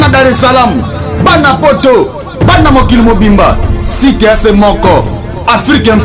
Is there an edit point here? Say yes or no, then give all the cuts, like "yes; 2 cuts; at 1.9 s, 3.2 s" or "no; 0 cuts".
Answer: no; 0 cuts